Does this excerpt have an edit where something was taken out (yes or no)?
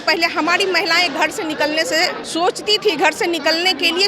yes